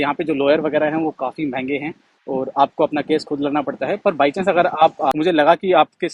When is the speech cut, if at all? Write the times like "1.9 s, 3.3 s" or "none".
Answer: 5.1 s